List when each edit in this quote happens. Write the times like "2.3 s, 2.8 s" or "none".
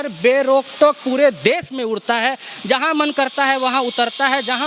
none